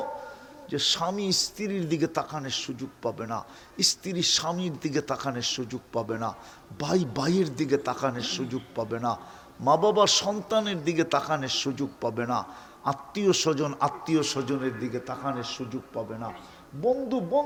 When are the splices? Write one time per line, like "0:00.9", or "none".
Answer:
none